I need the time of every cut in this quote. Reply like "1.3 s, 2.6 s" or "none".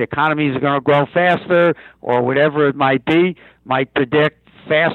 none

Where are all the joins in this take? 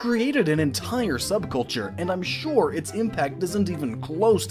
2.3 s

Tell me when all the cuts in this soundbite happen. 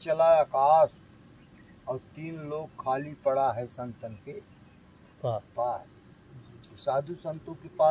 none

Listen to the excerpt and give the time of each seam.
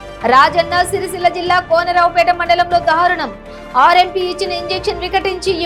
none

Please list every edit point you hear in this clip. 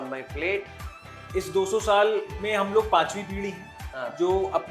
1.0 s

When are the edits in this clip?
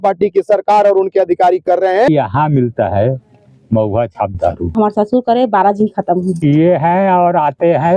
2.1 s, 4.7 s, 6.3 s

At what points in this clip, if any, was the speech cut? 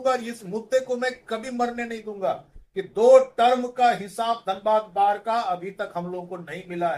none

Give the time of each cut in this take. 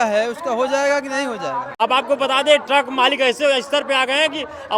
1.7 s

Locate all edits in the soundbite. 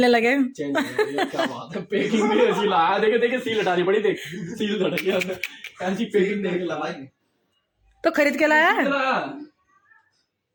none

